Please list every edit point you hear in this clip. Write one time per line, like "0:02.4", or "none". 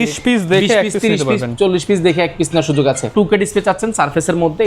0:03.1